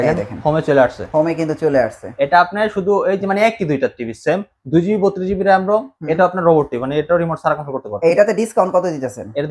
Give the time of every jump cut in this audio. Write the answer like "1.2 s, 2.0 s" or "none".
8.1 s